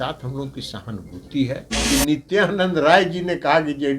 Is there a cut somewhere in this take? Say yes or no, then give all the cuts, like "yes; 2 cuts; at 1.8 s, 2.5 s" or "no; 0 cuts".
yes; 1 cut; at 1.7 s